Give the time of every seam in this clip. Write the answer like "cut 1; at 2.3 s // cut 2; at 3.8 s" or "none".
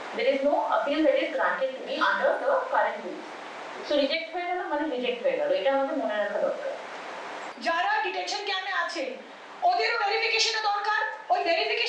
cut 1; at 7.5 s